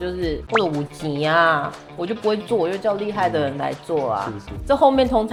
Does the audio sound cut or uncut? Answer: uncut